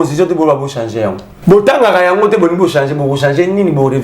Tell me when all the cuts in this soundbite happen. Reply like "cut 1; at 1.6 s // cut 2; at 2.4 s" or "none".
cut 1; at 1.3 s